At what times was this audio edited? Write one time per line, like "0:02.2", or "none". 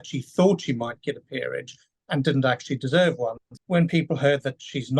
0:03.5